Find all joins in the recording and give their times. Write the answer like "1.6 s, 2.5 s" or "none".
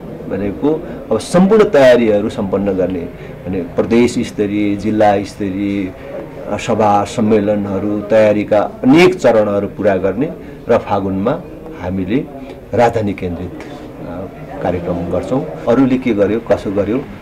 15.5 s